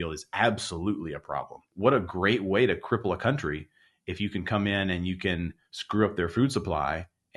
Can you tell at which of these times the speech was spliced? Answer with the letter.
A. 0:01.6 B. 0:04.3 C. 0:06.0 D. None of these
A